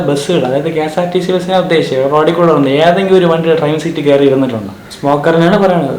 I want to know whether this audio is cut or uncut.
cut